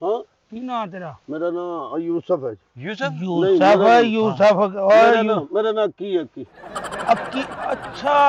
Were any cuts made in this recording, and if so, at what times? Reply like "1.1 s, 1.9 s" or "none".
none

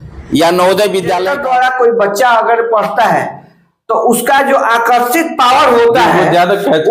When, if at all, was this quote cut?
1.3 s

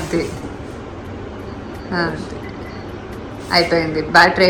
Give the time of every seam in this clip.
none

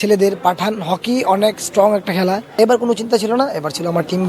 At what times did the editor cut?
2.4 s

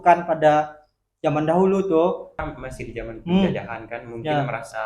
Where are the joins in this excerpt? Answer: 2.3 s

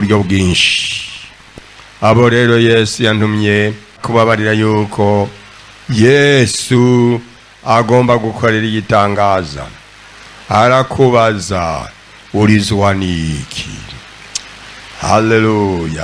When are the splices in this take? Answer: 4.0 s

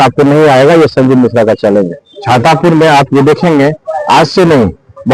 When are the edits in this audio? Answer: 2.0 s

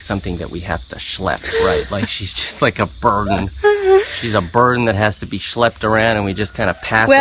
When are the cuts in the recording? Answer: 4.2 s

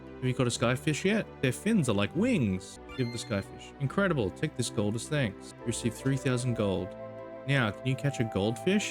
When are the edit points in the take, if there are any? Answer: 2.8 s, 5.5 s

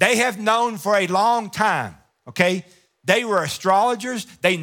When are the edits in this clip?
none

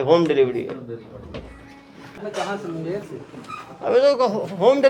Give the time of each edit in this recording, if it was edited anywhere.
2.2 s

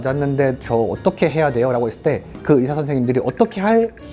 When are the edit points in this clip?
none

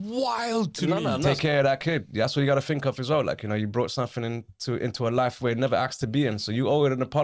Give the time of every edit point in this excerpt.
1.3 s

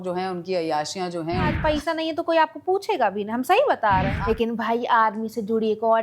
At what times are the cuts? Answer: 1.6 s, 4.1 s

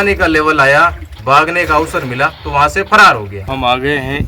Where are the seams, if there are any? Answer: 3.4 s

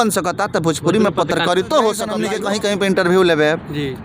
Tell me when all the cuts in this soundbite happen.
2.2 s

